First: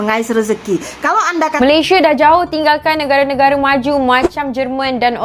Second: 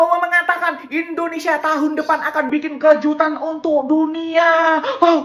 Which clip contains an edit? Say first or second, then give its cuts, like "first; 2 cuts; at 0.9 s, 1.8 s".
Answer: first; 1 cut; at 1.6 s